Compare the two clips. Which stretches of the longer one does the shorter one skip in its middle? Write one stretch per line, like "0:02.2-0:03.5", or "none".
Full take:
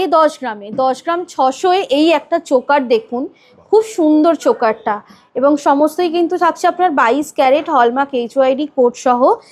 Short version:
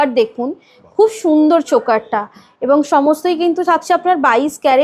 none